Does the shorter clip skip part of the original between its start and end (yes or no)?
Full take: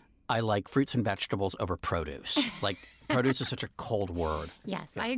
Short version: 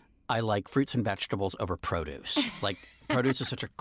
no